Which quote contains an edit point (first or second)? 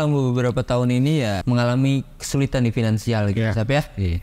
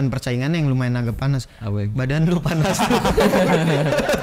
first